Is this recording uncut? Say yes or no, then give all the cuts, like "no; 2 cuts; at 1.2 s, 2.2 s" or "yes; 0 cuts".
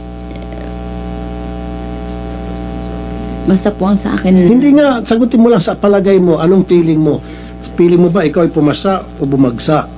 yes; 0 cuts